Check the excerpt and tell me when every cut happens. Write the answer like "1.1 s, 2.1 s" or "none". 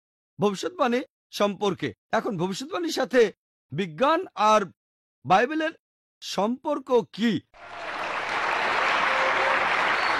none